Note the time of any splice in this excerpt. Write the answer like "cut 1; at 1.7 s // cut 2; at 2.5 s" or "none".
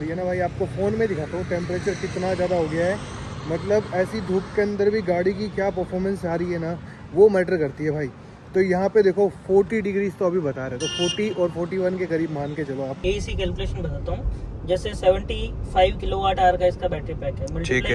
cut 1; at 13.0 s